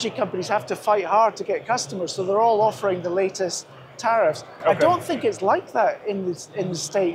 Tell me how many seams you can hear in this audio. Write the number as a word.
zero